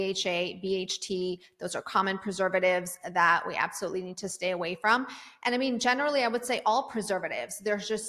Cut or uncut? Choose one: uncut